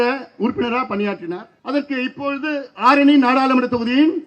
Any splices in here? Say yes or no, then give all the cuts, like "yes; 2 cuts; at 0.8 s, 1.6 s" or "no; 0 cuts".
yes; 1 cut; at 1.5 s